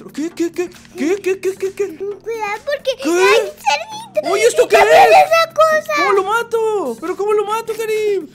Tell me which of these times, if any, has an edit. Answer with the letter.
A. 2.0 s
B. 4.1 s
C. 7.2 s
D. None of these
A